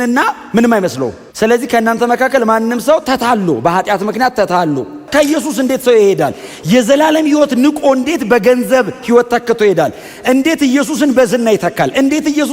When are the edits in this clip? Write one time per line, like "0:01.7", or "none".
0:01.2
0:05.0